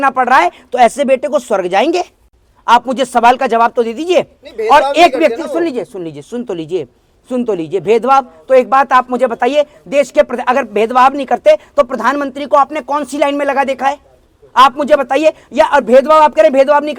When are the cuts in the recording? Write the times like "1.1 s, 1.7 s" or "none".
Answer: none